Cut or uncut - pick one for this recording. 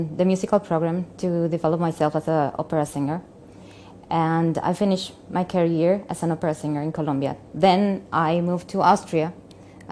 uncut